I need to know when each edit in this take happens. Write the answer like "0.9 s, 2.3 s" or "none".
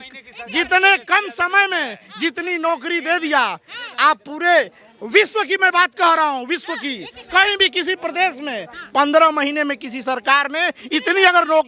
none

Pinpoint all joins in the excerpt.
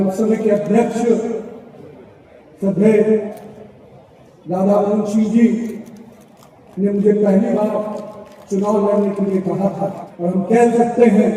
10.1 s

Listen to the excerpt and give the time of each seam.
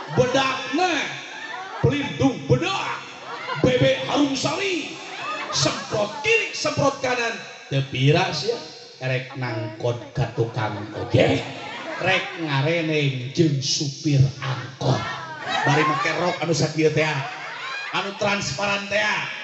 15.4 s

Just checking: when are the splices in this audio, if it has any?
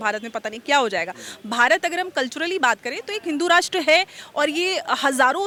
none

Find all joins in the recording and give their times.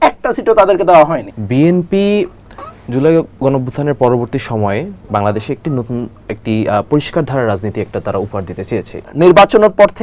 1.3 s, 8.9 s

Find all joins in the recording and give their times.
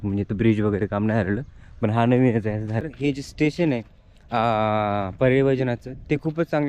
2.8 s

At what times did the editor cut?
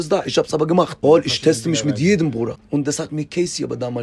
0.9 s, 2.6 s

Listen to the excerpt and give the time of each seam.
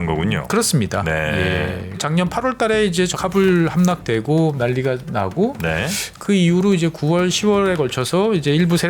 2.0 s, 4.5 s

